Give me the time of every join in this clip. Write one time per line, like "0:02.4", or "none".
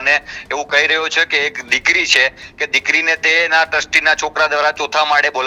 none